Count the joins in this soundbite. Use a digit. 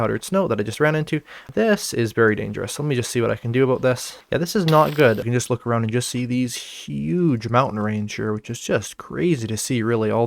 2